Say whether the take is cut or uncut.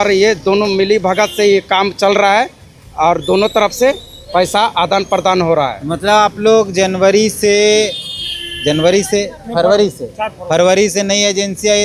uncut